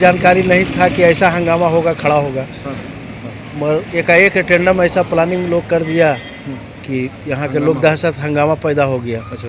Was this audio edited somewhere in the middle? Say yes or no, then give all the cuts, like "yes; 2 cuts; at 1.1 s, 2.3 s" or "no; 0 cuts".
no; 0 cuts